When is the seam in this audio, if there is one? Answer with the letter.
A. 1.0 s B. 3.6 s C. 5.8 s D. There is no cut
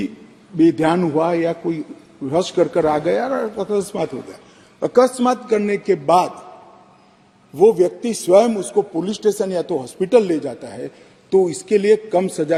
D